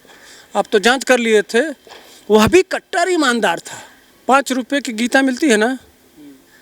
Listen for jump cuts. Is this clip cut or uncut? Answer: cut